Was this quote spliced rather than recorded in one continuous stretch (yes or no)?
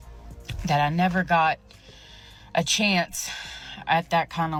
no